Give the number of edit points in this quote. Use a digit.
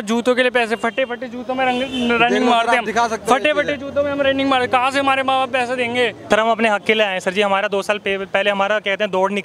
1